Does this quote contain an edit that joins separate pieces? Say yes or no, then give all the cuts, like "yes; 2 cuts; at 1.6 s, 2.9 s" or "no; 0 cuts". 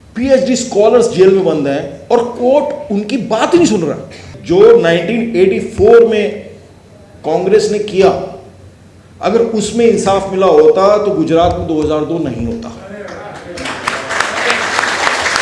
yes; 1 cut; at 4.3 s